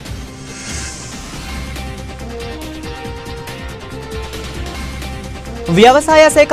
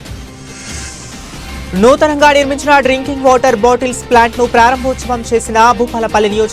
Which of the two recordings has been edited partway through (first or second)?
second